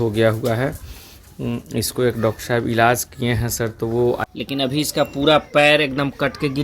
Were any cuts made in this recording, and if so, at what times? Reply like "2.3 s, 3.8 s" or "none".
4.2 s